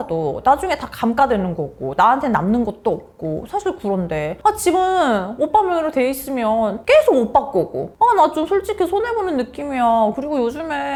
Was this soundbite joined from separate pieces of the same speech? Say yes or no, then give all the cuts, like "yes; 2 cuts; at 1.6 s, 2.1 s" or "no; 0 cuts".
no; 0 cuts